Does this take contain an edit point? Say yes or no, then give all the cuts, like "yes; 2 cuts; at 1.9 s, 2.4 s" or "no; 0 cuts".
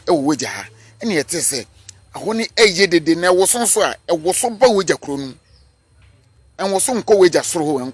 no; 0 cuts